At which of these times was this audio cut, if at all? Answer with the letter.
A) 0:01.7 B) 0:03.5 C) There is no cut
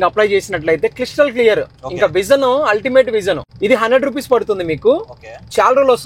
B